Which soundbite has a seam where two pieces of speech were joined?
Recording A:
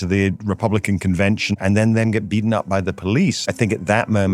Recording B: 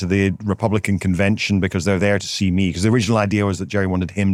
A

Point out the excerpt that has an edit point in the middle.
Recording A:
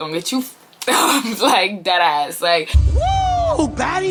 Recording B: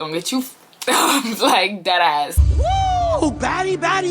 B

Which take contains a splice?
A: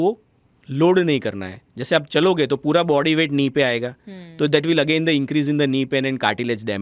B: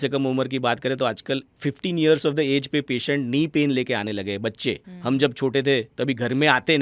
B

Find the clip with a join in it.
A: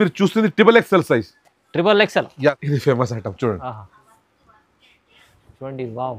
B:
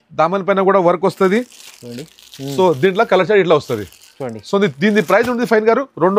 A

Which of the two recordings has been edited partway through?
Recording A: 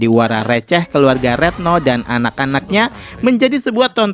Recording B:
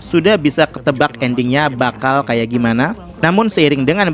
B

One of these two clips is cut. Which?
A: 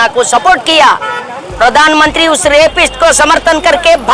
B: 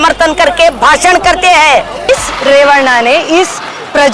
B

